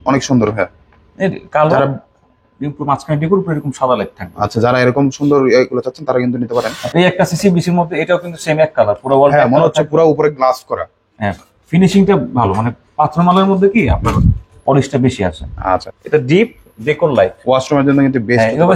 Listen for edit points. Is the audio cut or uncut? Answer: cut